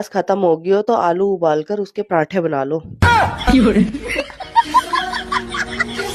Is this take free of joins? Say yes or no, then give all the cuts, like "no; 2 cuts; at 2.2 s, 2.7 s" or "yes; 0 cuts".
yes; 0 cuts